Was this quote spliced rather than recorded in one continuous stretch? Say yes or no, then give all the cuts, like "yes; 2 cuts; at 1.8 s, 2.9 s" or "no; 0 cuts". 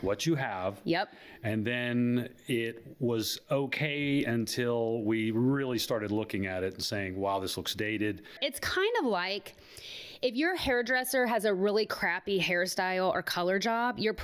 yes; 1 cut; at 8.5 s